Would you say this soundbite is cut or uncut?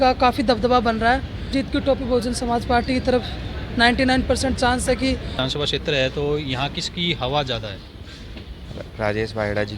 cut